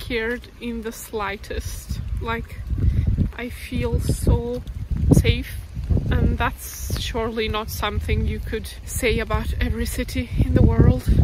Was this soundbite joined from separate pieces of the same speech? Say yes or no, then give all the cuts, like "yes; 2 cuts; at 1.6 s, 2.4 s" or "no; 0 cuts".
yes; 3 cuts; at 4.9 s, 5.8 s, 8.8 s